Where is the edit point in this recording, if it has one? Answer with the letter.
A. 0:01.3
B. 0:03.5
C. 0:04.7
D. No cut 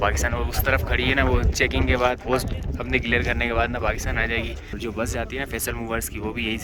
C